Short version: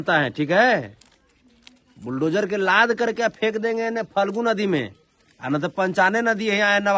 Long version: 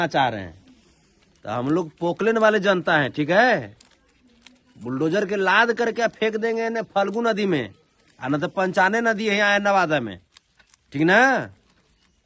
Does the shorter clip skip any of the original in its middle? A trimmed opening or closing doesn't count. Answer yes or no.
no